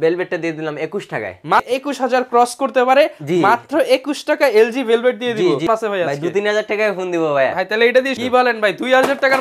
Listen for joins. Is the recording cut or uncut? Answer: cut